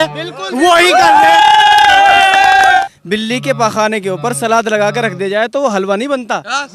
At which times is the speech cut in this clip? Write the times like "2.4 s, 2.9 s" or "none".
2.8 s